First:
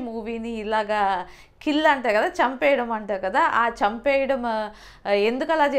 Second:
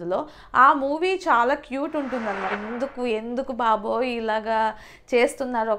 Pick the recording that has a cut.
second; 1 cut; at 2.5 s

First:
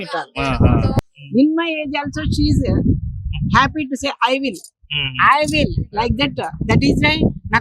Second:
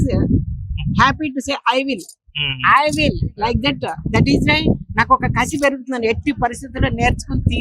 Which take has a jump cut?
first; 1 cut; at 1.0 s

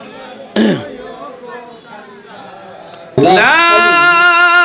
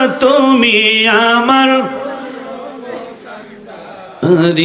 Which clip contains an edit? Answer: first; 1 cut; at 3.1 s

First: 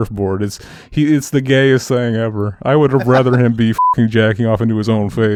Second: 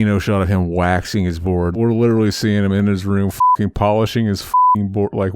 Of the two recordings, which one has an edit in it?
second; 1 cut; at 1.7 s

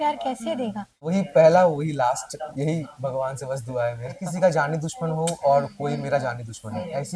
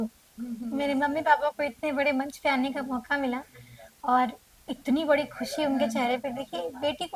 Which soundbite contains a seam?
first; 2 cuts; at 1.1 s, 4.2 s

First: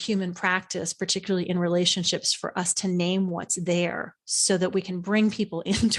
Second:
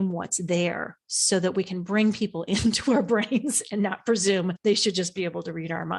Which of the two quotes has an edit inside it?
second; 1 cut; at 4.6 s

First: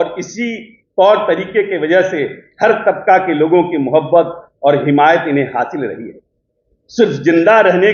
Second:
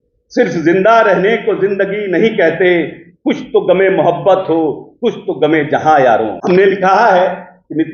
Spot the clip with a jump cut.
second; 1 cut; at 6.3 s

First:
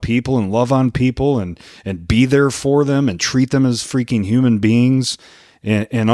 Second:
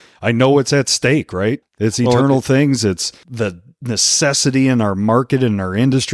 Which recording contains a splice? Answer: second; 2 cuts; at 1.7 s, 3.2 s

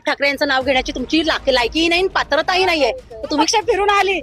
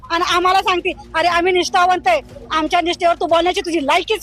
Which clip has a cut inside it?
first; 1 cut; at 3.3 s

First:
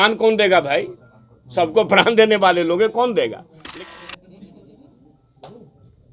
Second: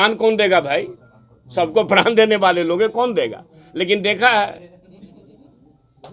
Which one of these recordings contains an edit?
first; 1 cut; at 3.9 s

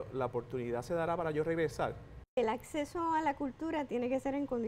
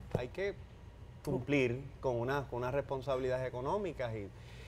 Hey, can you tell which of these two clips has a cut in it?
first; 1 cut; at 2.4 s

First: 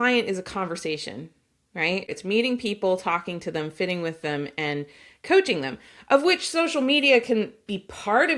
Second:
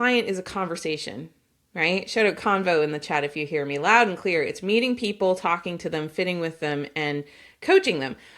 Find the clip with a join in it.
first; 1 cut; at 2.1 s

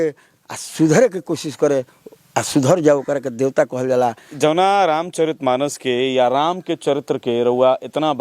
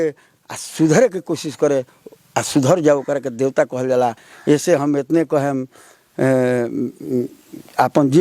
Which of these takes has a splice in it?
first; 1 cut; at 4.3 s

